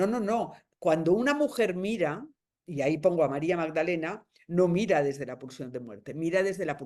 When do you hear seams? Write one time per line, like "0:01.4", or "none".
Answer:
none